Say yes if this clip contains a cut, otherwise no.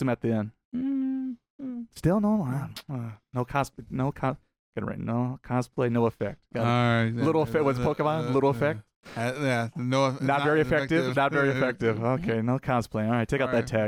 no